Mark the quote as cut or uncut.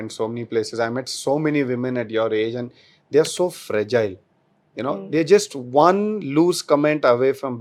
uncut